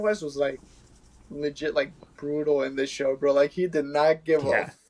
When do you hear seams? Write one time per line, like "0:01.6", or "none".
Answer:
none